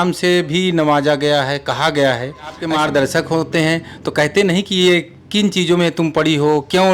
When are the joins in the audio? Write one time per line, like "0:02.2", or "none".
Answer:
0:02.6